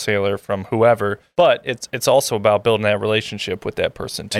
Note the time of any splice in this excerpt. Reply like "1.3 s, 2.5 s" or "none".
1.2 s